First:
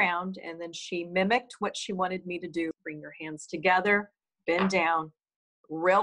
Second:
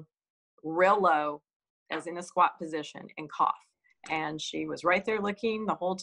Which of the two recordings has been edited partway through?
first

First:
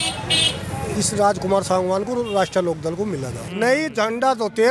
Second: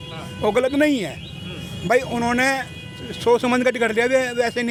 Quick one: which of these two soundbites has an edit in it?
first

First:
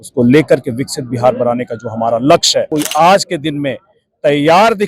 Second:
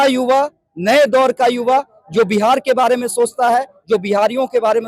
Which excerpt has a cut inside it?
first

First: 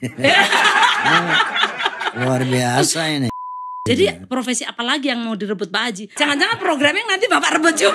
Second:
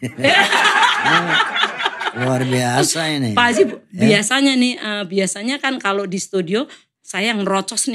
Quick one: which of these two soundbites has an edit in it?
first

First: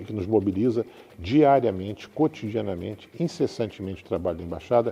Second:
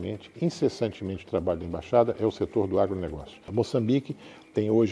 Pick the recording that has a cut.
second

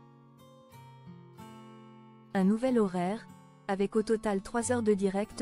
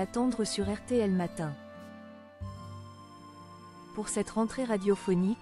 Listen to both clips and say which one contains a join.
second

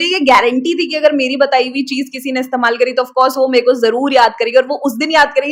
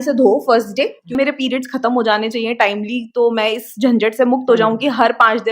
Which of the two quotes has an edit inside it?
second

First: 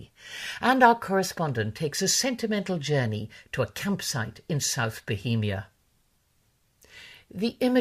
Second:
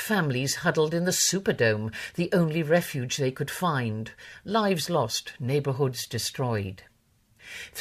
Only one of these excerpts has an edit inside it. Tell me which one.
first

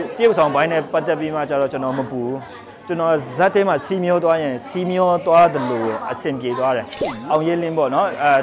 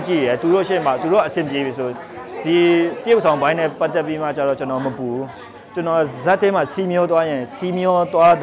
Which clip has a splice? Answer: first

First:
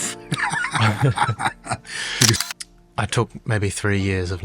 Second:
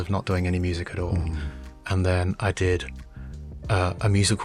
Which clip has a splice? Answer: first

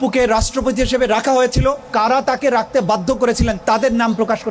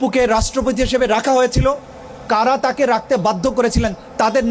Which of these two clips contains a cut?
first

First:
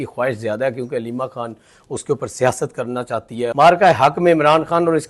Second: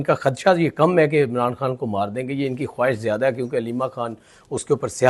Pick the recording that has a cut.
first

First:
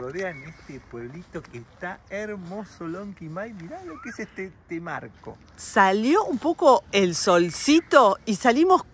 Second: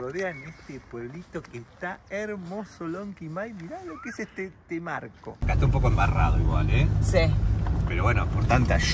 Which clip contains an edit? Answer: second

